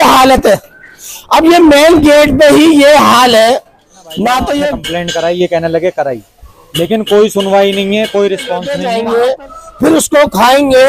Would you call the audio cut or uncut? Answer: cut